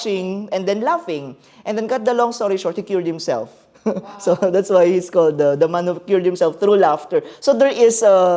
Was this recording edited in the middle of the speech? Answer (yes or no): no